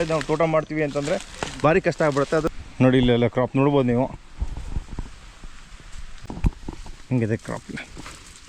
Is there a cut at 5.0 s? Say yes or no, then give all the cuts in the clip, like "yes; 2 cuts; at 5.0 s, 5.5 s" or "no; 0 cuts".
no; 2 cuts; at 2.5 s, 6.3 s